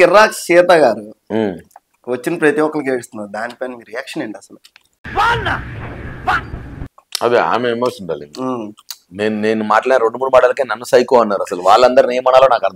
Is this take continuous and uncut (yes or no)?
no